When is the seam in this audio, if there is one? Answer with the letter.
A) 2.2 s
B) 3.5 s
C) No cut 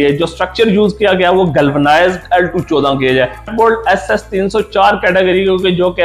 B